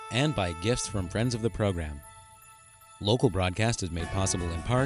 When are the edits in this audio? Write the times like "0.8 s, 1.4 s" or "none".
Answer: none